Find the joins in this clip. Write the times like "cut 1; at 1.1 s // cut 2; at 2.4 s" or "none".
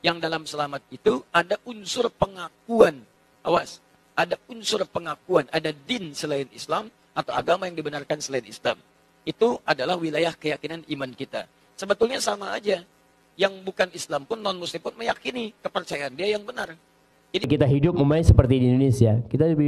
none